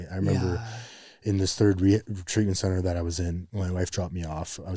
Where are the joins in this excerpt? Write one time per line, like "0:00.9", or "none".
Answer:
0:03.5